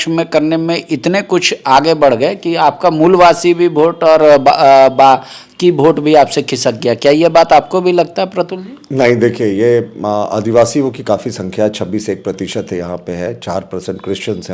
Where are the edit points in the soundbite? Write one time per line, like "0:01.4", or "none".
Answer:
none